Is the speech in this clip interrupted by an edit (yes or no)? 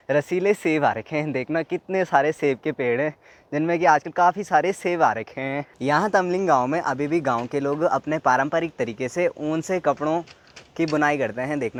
no